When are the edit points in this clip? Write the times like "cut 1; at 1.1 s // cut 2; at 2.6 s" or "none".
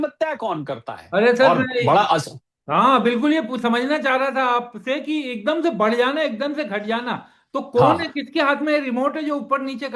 none